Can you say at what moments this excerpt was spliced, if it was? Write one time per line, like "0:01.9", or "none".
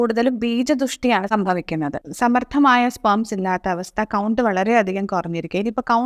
0:02.0